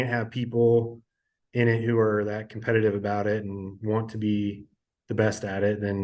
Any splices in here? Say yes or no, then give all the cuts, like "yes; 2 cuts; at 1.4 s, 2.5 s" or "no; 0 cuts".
no; 0 cuts